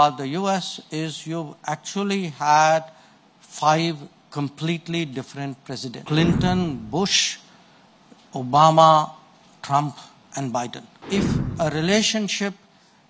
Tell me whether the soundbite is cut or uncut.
cut